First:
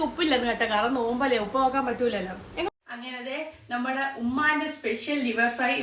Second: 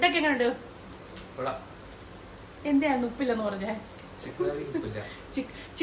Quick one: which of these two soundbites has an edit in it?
first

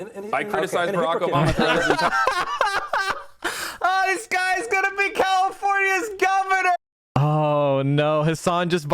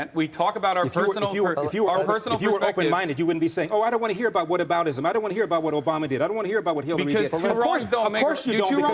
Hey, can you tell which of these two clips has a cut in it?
first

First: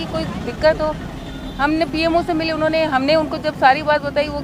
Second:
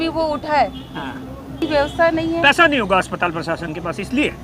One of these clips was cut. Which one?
second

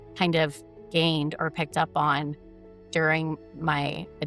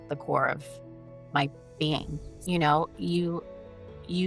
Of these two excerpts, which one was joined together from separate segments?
second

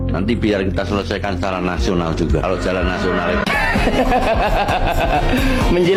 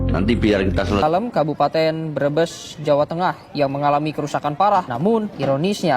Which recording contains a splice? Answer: second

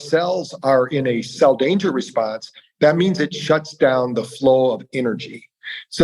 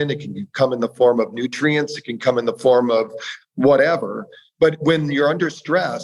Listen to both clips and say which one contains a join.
first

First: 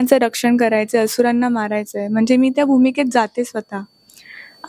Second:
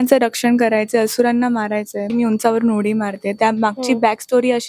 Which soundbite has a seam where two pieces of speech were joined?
second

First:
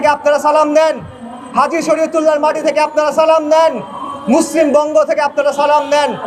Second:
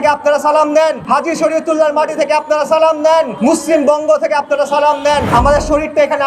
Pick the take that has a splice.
second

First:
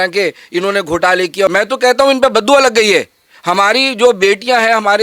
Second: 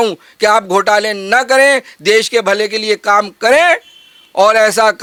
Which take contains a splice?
first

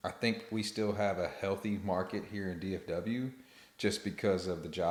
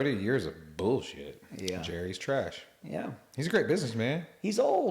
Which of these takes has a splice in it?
second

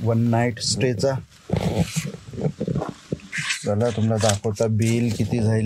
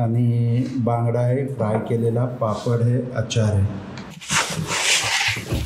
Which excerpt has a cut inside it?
second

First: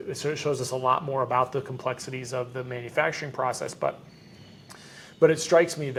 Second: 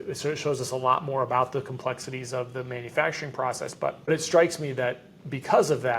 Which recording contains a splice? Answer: second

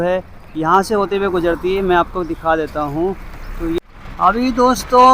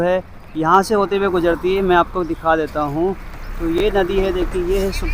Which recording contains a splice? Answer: first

